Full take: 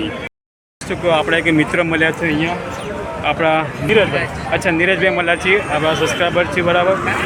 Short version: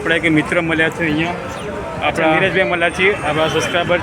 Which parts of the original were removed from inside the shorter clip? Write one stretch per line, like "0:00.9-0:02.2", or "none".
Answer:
0:03.6-0:04.9